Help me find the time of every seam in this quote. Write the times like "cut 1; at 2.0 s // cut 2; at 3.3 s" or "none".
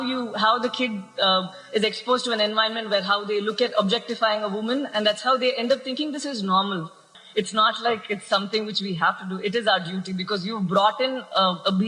cut 1; at 7.1 s